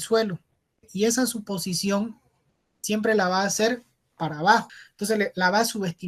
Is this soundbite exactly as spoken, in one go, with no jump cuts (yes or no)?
no